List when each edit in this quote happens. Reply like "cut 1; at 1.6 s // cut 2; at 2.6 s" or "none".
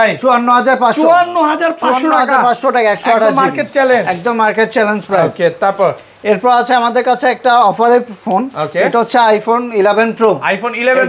none

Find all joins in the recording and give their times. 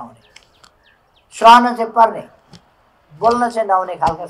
none

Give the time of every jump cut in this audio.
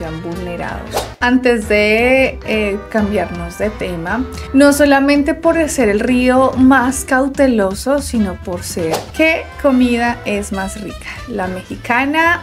cut 1; at 1.0 s // cut 2; at 9.0 s

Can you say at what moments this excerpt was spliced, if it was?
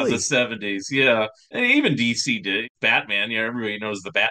cut 1; at 1.4 s // cut 2; at 2.7 s

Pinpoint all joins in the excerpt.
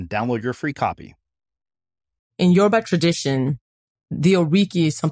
cut 1; at 2.3 s

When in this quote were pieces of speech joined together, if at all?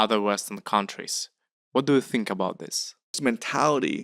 cut 1; at 3.1 s

